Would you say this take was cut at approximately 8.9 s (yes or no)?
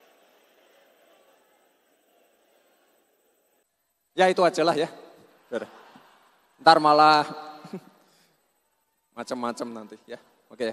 no